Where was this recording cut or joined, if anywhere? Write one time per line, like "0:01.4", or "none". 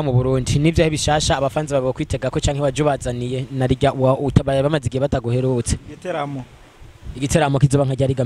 none